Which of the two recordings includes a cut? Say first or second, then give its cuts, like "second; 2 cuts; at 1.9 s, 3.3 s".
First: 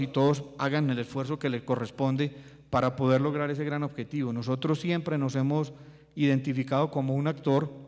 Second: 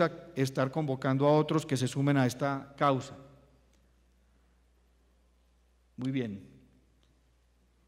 first; 1 cut; at 2.3 s